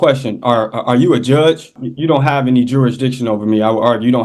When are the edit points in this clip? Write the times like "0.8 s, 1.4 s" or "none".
1.8 s